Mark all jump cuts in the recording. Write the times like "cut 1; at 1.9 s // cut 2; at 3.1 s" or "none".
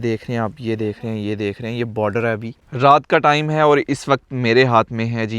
cut 1; at 2.6 s